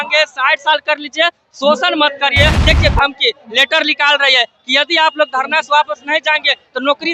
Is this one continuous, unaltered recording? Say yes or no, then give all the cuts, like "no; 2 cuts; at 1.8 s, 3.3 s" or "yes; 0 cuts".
no; 1 cut; at 2.6 s